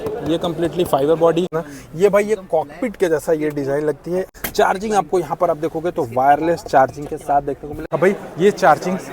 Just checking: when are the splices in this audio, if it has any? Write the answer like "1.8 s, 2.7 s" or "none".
1.6 s, 4.4 s, 7.7 s